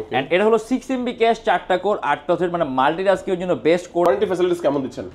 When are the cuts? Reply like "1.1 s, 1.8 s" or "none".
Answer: 4.0 s